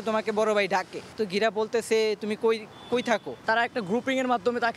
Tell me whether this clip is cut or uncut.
uncut